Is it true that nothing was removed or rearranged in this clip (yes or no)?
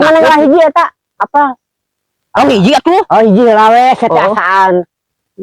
yes